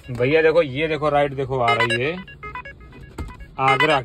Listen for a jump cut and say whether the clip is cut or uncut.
uncut